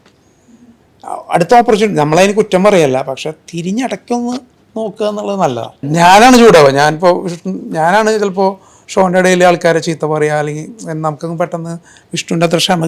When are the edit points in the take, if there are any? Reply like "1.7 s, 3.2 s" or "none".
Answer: 5.8 s